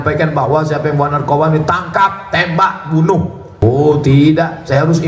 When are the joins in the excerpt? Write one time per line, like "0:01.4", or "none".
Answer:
0:03.5